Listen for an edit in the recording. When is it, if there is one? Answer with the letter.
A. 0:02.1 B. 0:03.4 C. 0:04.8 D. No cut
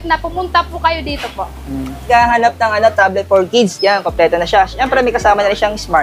A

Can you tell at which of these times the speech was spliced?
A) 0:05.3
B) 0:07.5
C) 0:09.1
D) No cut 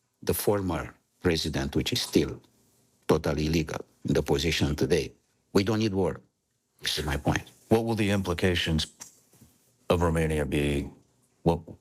A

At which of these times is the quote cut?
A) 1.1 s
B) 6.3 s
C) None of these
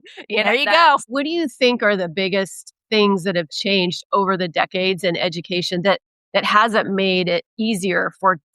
A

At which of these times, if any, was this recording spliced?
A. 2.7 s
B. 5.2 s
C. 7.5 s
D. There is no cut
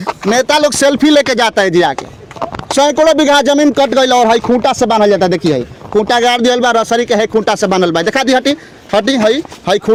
D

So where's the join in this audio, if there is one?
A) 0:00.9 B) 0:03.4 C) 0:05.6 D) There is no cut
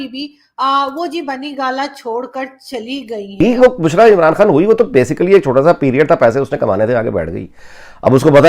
B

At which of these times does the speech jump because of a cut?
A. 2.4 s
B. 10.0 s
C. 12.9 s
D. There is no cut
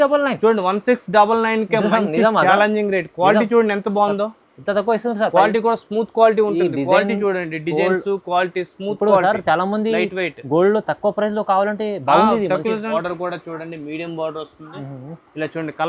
C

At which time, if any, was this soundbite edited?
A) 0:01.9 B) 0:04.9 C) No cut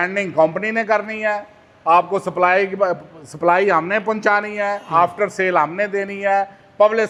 C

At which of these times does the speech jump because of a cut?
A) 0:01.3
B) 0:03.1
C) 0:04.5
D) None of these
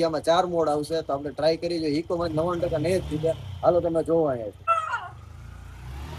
D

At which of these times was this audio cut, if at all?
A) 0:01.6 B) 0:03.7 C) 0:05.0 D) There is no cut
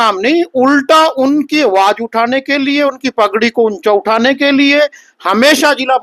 D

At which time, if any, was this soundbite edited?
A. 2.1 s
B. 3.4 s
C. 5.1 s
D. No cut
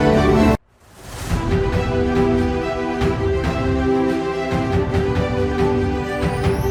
D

